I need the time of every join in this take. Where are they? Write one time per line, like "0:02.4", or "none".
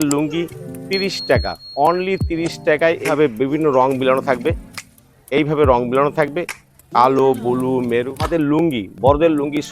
0:03.1
0:08.2